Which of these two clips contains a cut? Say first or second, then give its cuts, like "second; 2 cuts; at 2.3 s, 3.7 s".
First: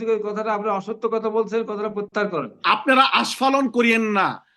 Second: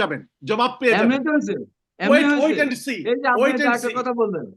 first; 1 cut; at 2.5 s